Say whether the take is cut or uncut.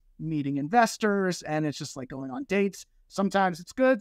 uncut